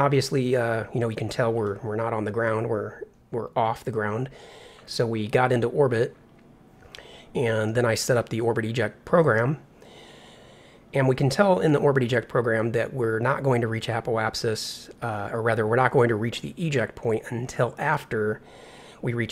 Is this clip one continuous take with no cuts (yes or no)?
no